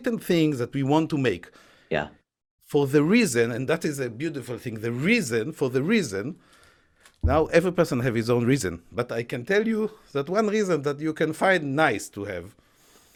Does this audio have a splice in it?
no; 0 cuts

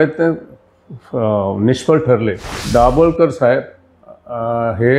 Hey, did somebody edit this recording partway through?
yes; 1 cut; at 2.5 s

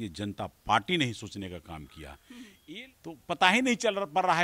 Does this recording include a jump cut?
yes; 1 cut; at 2.8 s

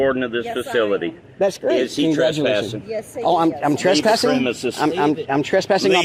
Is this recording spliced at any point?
no; 0 cuts

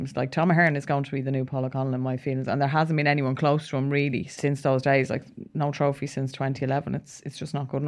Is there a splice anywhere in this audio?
yes; 2 cuts; at 1.5 s, 4.3 s

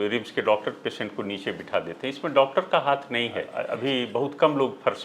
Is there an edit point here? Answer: no; 0 cuts

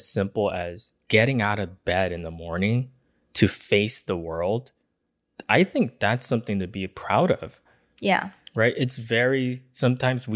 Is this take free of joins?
yes; 0 cuts

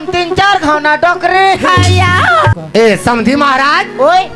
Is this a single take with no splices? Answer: no; 1 cut; at 2.6 s

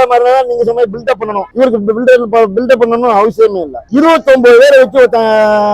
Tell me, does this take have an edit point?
yes; 1 cut; at 3.9 s

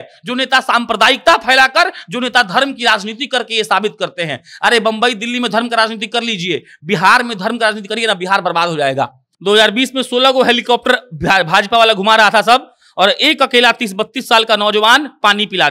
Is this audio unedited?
no; 1 cut; at 9.2 s

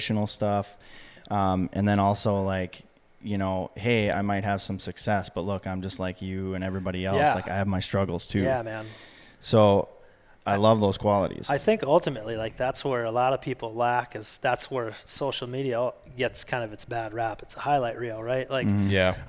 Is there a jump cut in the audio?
no; 0 cuts

